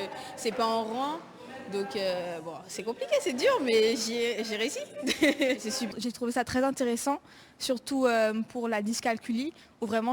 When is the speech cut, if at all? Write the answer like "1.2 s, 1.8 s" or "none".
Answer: 5.8 s